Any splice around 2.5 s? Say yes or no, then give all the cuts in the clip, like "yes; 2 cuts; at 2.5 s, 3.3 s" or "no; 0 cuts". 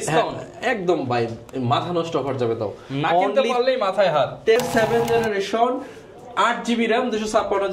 no; 1 cut; at 4.6 s